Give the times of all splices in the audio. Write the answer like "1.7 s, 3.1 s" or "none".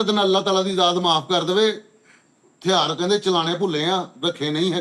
none